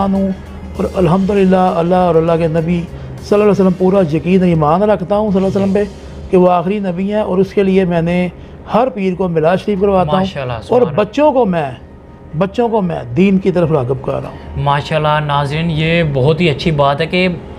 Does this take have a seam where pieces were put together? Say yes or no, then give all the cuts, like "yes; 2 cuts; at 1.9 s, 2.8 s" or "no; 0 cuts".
no; 0 cuts